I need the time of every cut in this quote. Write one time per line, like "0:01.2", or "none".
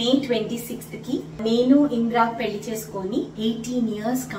0:01.4
0:03.3